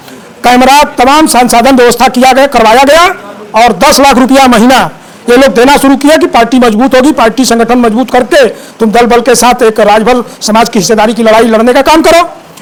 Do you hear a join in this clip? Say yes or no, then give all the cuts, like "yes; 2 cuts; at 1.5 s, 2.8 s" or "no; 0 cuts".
no; 0 cuts